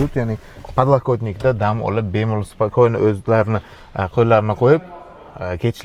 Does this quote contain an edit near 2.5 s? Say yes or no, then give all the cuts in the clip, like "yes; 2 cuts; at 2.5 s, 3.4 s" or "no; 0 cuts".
no; 0 cuts